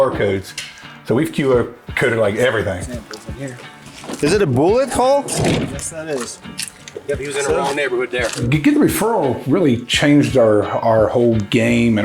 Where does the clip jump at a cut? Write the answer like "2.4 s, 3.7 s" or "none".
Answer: 2.8 s, 8.5 s